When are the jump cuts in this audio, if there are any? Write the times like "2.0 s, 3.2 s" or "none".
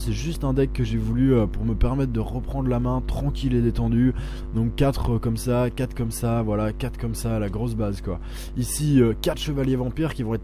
3.1 s